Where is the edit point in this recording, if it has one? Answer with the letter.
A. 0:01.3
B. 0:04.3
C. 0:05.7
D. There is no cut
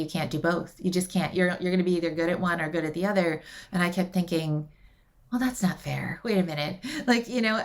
A